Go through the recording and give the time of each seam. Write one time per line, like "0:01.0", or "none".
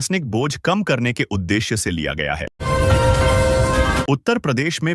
0:02.6
0:04.0